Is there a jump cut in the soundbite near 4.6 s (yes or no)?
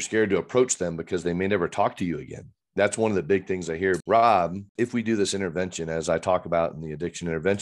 yes